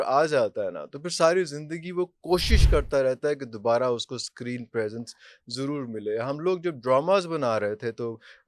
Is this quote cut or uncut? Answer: uncut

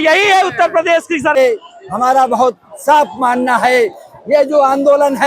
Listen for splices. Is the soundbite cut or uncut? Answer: cut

